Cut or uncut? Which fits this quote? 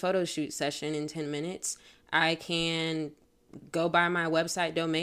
uncut